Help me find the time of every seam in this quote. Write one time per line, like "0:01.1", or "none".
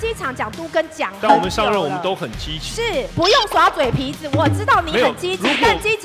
0:03.1